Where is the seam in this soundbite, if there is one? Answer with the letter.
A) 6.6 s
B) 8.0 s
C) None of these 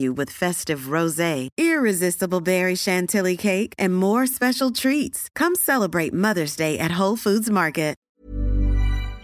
B